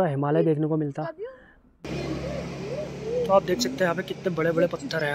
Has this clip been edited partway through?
yes; 1 cut; at 1.7 s

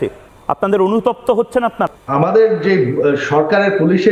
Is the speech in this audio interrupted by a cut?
yes; 1 cut; at 1.9 s

